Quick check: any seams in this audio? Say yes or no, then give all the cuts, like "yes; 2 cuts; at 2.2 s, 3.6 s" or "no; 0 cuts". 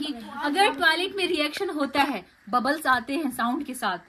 no; 0 cuts